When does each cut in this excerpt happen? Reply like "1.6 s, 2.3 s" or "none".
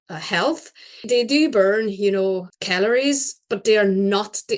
1.0 s, 2.6 s